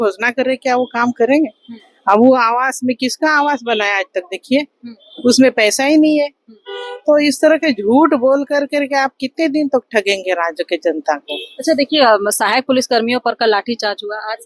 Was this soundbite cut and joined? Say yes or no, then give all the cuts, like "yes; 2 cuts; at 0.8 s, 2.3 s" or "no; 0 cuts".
no; 0 cuts